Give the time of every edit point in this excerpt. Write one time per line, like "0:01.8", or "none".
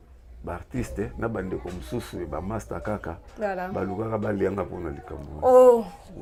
none